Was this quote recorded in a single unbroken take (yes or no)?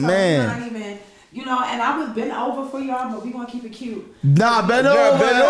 yes